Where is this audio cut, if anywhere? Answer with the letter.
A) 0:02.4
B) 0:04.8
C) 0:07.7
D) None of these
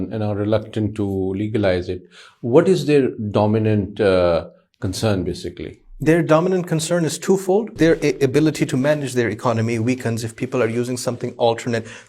C